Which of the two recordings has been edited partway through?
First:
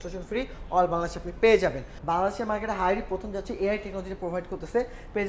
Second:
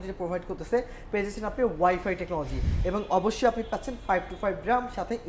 first; 1 cut; at 1.9 s

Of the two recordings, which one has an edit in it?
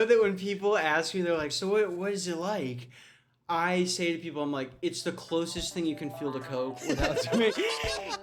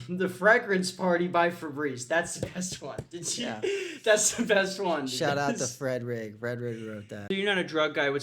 second; 1 cut; at 7.1 s

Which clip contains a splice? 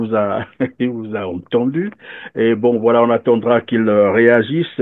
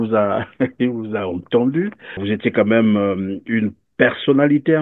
second; 1 cut; at 2.2 s

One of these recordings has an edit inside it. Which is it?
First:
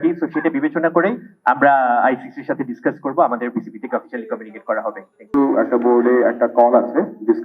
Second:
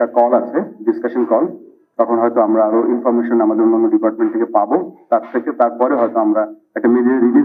first; 1 cut; at 5.3 s

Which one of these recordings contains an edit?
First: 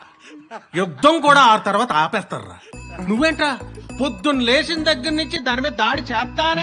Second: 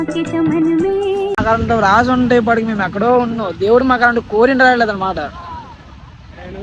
second; 1 cut; at 1.4 s

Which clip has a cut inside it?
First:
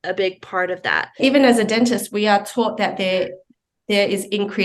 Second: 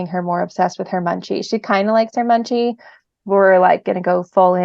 first; 1 cut; at 1.2 s

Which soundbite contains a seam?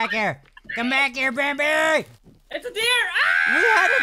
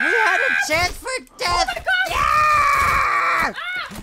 first; 1 cut; at 2.1 s

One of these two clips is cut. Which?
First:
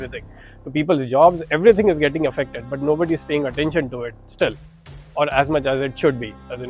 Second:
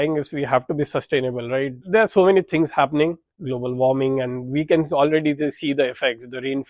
second; 2 cuts; at 1.8 s, 3.3 s

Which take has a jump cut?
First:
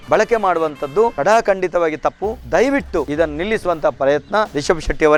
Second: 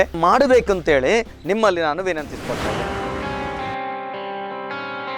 second; 2 cuts; at 1.4 s, 2.7 s

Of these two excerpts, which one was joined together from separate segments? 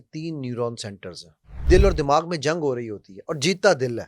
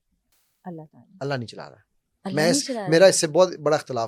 first; 1 cut; at 1.6 s

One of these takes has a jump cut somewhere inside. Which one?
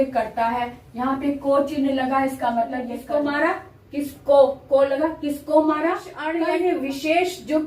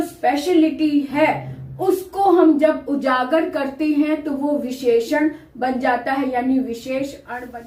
first; 2 cuts; at 2.9 s, 6.2 s

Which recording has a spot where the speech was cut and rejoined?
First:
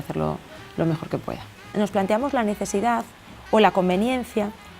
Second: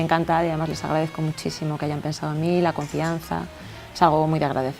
first; 1 cut; at 1.7 s

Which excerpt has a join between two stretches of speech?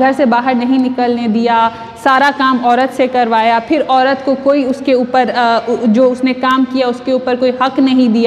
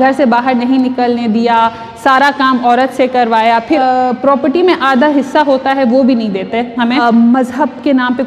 second; 2 cuts; at 3.8 s, 7.0 s

